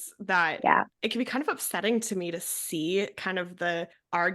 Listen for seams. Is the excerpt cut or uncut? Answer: cut